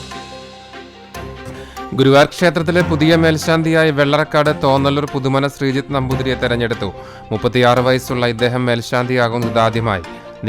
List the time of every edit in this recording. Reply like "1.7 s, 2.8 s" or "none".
1.5 s